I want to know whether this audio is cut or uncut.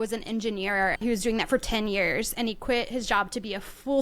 cut